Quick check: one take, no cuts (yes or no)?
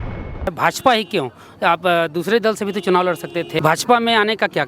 no